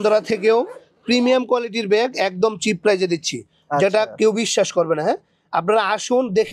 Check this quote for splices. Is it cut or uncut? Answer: uncut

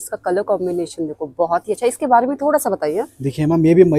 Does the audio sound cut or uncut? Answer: uncut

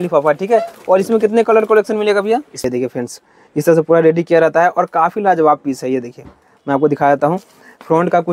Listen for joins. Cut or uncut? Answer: cut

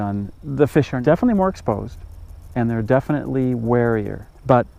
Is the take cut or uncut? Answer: uncut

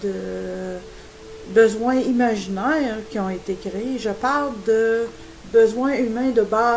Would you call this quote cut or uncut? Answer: cut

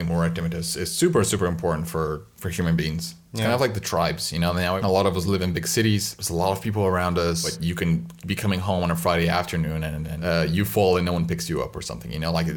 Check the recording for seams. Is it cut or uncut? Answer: cut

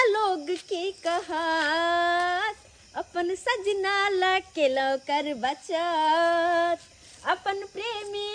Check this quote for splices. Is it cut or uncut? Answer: uncut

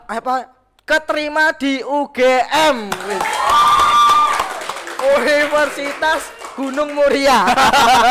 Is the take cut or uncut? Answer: cut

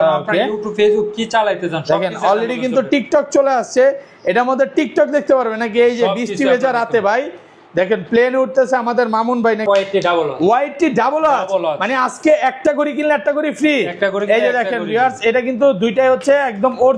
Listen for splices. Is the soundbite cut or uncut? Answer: cut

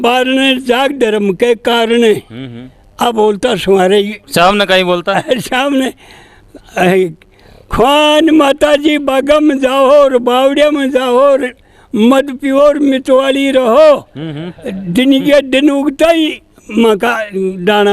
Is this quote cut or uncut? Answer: cut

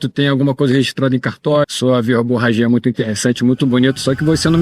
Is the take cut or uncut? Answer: cut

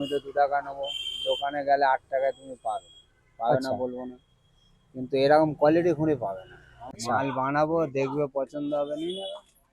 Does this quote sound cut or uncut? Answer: cut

